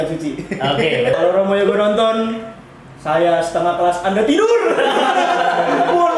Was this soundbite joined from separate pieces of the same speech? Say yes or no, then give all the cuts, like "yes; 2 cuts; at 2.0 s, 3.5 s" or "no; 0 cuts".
yes; 1 cut; at 1.2 s